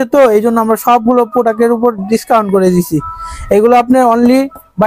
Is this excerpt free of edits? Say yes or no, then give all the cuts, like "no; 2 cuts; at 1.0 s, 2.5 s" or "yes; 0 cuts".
yes; 0 cuts